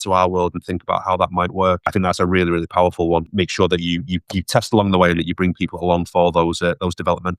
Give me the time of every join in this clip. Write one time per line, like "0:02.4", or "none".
0:01.9
0:03.3